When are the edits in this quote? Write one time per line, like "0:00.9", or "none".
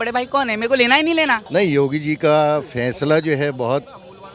0:01.4

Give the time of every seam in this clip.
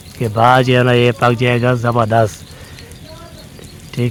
none

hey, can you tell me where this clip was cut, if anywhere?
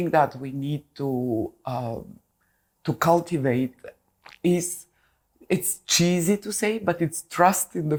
none

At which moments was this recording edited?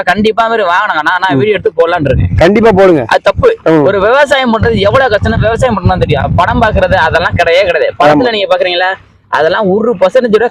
none

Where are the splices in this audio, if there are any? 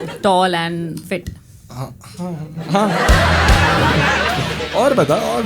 0:04.5

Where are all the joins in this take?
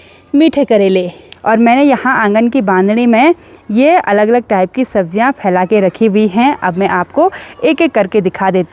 0:01.3

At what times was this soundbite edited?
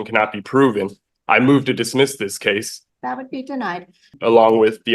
0:02.8
0:04.1

